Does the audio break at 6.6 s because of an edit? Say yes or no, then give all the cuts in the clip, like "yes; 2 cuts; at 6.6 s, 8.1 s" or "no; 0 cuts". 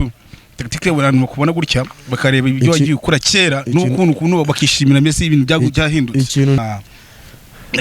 yes; 1 cut; at 6.6 s